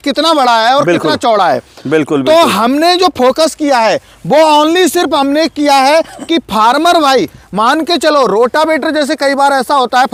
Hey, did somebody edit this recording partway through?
no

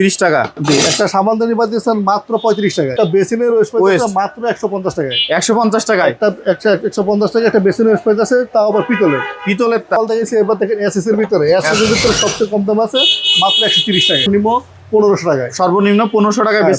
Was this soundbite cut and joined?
yes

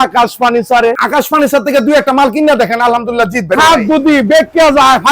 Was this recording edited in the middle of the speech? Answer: yes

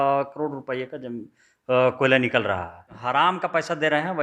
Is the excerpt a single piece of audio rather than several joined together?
no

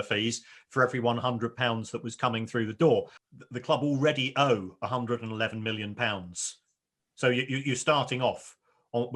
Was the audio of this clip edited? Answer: yes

